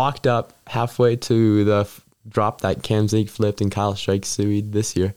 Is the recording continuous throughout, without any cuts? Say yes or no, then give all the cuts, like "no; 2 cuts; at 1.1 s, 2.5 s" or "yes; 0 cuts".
yes; 0 cuts